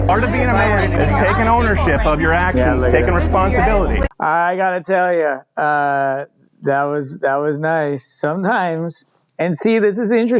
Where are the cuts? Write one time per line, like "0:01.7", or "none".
0:04.1